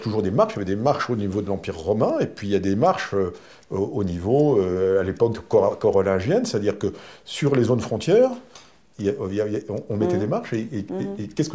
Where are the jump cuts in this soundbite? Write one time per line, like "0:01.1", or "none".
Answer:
none